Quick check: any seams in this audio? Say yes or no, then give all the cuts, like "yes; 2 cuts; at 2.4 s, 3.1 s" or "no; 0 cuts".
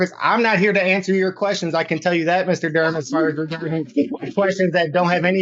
no; 0 cuts